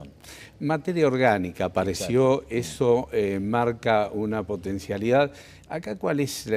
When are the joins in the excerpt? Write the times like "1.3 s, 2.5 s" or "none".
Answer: 3.1 s